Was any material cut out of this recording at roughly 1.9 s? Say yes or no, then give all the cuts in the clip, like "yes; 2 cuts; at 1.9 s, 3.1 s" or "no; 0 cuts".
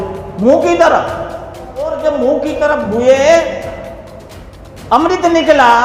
yes; 1 cut; at 1.9 s